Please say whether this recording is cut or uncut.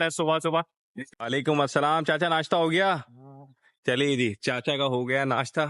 uncut